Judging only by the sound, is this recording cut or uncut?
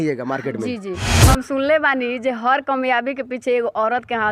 cut